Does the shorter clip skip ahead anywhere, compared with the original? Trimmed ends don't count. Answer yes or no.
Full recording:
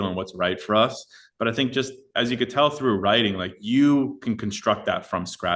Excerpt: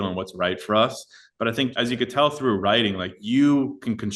yes